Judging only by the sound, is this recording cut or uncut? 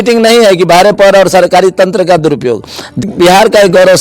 cut